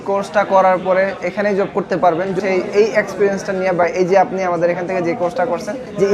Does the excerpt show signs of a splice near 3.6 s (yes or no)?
no